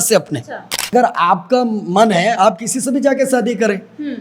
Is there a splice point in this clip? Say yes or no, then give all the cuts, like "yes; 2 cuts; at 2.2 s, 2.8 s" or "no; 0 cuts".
yes; 1 cut; at 0.9 s